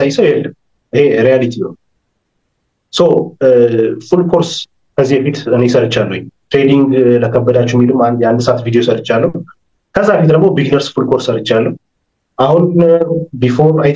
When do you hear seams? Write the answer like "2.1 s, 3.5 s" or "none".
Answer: none